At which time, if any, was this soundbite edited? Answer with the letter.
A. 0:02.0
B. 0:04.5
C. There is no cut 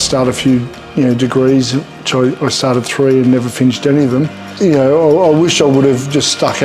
B